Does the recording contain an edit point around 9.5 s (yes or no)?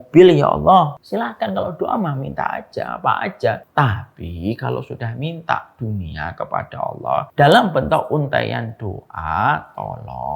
no